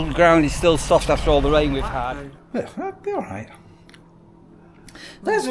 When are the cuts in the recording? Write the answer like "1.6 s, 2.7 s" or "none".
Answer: 1.9 s